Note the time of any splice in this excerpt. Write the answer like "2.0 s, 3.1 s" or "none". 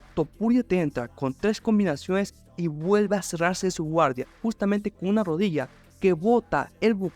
4.4 s